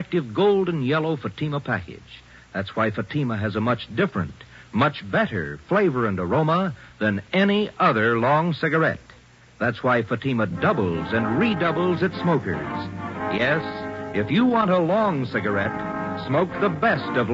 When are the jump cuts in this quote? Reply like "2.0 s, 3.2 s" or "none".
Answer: 2.8 s

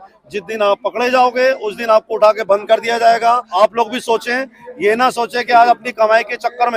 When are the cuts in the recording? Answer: 3.5 s

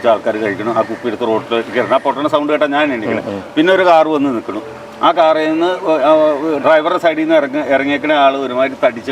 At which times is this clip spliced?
none

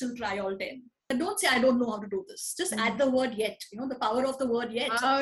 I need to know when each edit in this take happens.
1.1 s

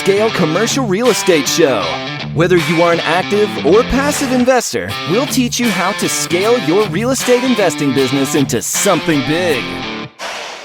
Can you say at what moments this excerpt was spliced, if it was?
none

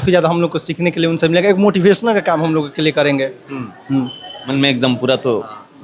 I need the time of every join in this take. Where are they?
4.3 s

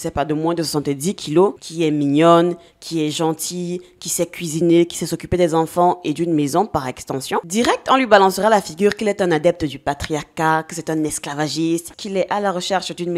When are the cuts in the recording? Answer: none

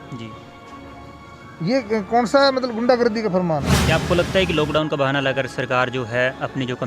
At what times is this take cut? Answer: 3.7 s

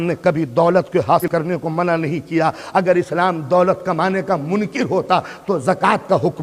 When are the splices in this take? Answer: 1.3 s

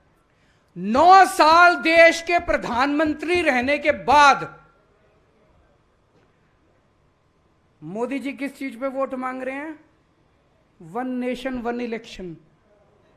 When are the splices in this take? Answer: none

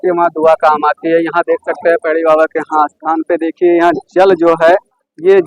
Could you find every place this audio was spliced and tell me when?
none

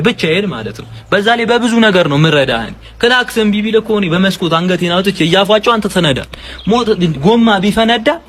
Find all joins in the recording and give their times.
none

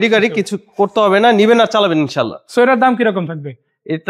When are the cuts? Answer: none

